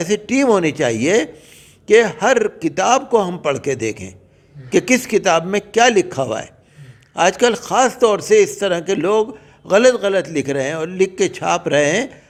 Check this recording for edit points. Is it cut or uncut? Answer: uncut